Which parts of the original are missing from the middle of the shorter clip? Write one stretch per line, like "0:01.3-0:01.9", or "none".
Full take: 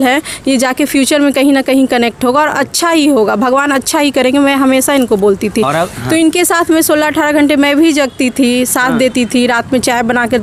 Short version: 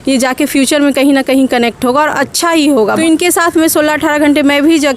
0:03.4-0:06.1